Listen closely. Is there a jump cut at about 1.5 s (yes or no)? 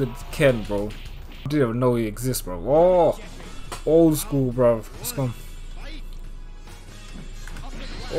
yes